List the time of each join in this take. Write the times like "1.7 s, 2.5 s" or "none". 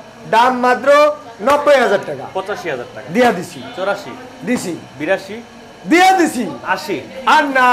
none